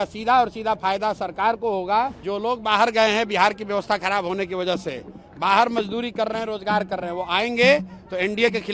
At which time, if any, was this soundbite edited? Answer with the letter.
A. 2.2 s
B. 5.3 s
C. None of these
A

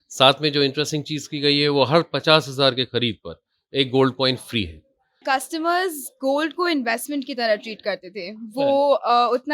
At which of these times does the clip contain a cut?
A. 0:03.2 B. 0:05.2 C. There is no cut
B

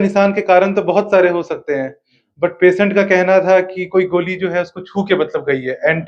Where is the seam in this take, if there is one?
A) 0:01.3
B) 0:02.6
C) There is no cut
C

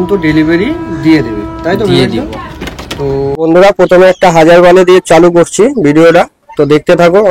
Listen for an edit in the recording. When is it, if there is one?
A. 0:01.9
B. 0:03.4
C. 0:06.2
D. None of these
B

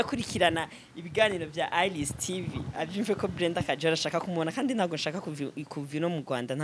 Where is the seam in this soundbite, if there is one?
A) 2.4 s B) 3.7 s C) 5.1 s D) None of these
D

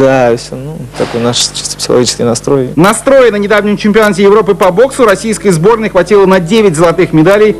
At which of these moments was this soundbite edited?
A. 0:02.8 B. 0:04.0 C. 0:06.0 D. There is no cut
A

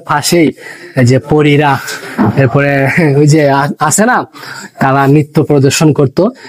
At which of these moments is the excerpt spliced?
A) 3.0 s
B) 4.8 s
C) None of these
C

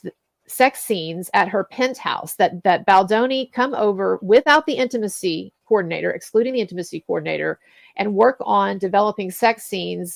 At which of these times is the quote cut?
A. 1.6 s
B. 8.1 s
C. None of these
C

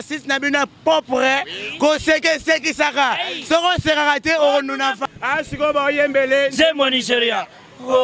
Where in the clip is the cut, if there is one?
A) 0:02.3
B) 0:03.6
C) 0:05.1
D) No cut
C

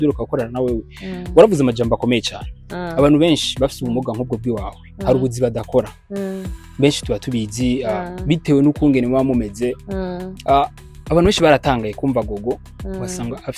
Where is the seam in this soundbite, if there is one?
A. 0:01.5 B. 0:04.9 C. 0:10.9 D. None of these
D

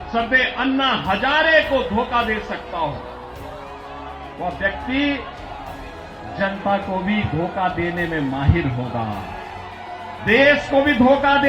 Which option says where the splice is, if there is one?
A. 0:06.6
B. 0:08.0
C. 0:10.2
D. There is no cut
C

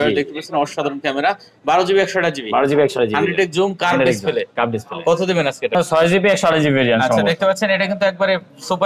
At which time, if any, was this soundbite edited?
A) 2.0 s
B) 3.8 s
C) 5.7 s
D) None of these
C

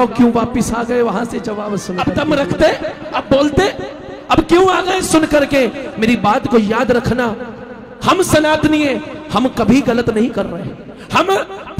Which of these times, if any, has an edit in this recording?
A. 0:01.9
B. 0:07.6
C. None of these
A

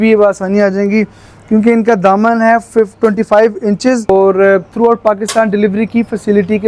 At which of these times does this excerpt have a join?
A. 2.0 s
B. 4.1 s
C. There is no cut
B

